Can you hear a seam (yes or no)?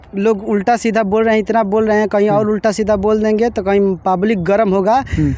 no